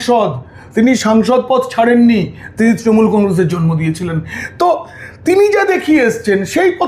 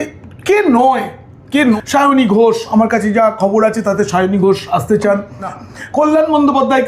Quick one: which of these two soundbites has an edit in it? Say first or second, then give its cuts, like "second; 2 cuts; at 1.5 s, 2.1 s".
second; 2 cuts; at 1.8 s, 5.6 s